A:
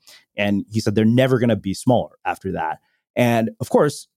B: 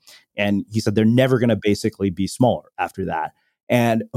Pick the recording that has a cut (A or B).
A